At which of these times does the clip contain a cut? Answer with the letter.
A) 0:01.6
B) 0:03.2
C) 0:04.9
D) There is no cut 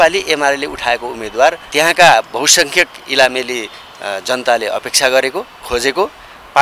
A